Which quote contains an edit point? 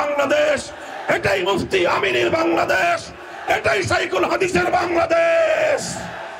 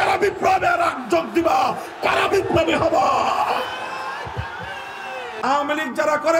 second; 1 cut; at 5.4 s

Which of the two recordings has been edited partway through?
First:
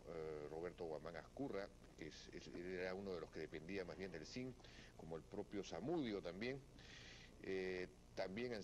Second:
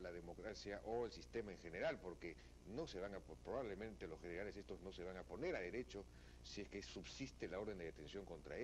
second; 1 cut; at 5.5 s

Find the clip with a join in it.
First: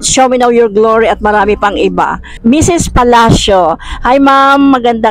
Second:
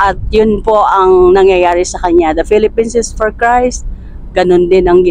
first; 1 cut; at 2.2 s

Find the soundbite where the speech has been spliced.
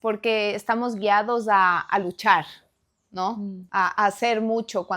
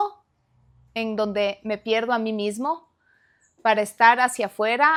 first; 1 cut; at 3.6 s

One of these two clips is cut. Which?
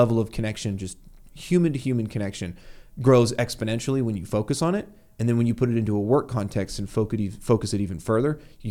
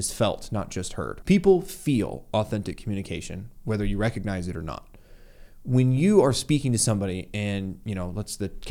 second; 1 cut; at 1.2 s

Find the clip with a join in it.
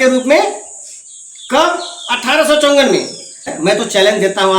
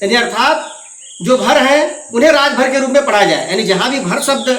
first; 1 cut; at 3.4 s

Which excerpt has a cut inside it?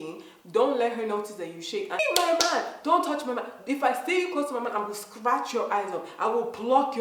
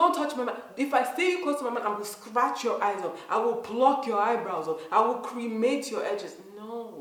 first; 1 cut; at 2.0 s

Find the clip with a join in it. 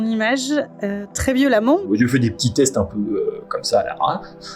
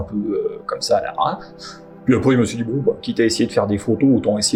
first; 1 cut; at 1.8 s

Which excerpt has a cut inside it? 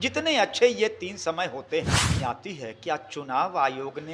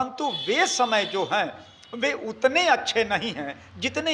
first; 1 cut; at 2.1 s

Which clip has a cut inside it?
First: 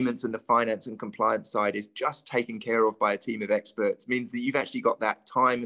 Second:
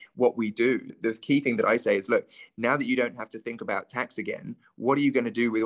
second; 1 cut; at 0.9 s

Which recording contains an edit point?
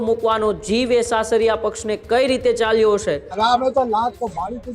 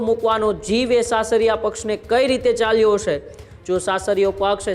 first; 1 cut; at 3.4 s

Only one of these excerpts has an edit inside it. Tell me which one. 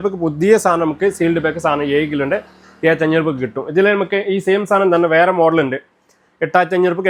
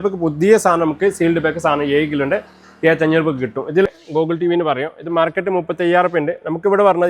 second; 1 cut; at 3.9 s

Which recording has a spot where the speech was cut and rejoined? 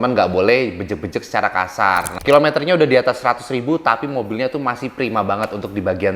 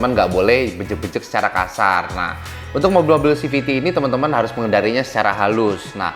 first; 1 cut; at 2.2 s

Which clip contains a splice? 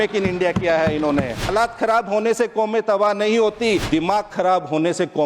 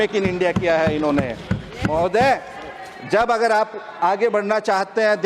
first; 2 cuts; at 1.5 s, 3.8 s

